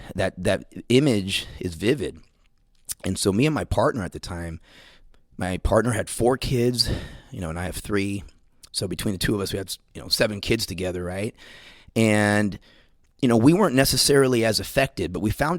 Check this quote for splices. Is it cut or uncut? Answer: uncut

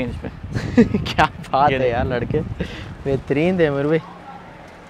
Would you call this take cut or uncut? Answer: uncut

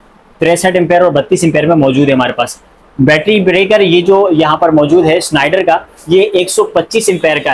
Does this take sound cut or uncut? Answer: uncut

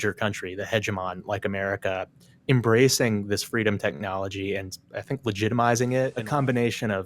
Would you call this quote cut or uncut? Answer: cut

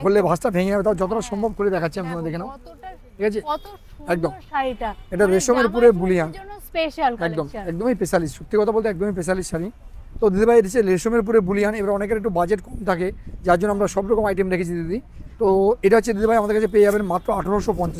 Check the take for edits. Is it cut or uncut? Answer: uncut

